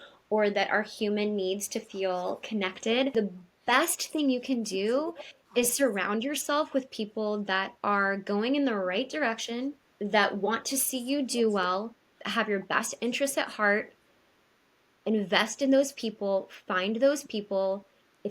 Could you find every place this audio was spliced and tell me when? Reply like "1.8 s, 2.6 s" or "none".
3.1 s, 9.9 s